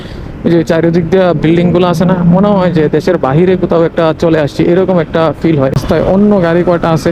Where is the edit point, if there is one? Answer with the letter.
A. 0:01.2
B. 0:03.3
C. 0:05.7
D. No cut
C